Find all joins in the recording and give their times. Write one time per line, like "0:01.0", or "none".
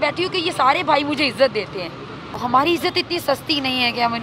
0:02.4